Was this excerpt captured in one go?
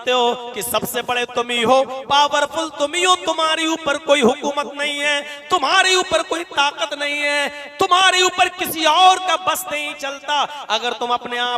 yes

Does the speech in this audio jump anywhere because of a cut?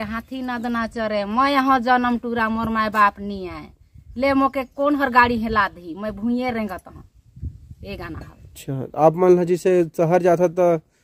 yes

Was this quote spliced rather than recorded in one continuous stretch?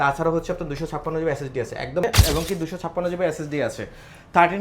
yes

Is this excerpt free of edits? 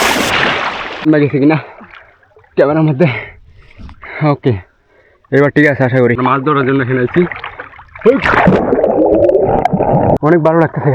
no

